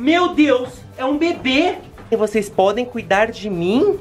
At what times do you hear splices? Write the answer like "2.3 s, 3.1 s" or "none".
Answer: 2.1 s